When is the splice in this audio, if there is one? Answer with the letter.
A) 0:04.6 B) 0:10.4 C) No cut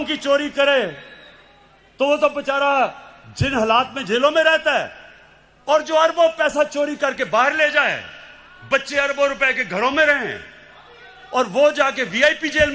C